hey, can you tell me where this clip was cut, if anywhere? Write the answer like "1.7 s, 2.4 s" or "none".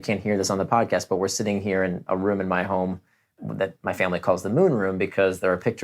2.0 s, 3.4 s